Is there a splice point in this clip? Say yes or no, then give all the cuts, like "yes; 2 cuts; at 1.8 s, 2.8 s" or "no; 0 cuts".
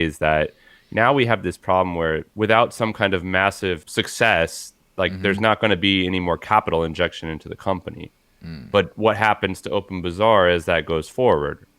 yes; 2 cuts; at 2.3 s, 3.8 s